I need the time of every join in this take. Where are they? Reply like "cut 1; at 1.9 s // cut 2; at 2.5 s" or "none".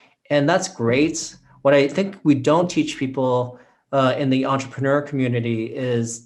none